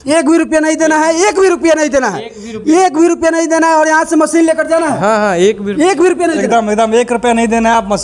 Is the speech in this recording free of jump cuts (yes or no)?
yes